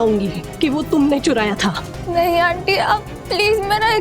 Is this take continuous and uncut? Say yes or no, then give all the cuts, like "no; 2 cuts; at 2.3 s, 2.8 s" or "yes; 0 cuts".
no; 1 cut; at 1.9 s